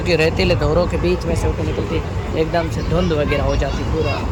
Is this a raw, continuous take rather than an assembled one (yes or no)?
yes